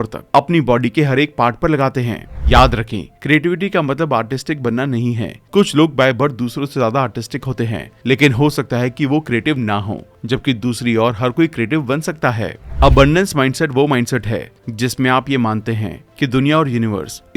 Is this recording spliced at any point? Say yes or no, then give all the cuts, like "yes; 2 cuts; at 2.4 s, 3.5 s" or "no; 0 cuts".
yes; 2 cuts; at 2.3 s, 12.6 s